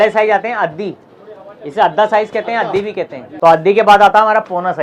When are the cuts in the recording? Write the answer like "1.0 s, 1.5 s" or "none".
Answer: 3.2 s